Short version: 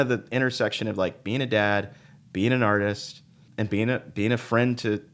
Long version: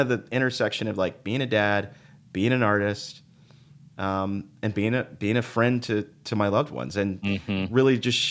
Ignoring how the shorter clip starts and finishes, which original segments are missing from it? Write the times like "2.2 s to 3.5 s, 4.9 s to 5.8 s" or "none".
3.4 s to 4.5 s